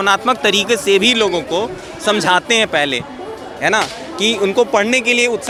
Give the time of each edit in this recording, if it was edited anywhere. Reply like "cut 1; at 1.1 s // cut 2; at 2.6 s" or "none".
none